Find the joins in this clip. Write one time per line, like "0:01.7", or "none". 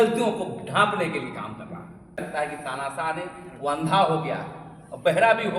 0:02.2